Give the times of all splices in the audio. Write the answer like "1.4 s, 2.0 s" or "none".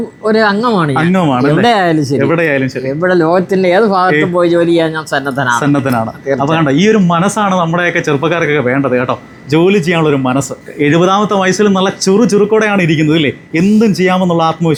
none